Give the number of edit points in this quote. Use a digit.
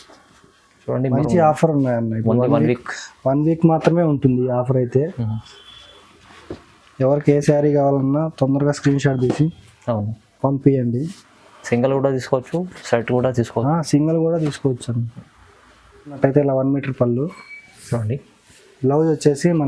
2